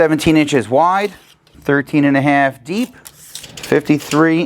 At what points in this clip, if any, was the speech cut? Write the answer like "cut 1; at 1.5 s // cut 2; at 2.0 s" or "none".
none